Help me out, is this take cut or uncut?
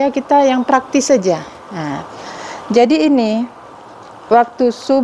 uncut